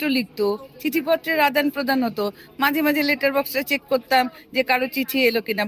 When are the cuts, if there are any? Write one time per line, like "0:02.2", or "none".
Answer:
none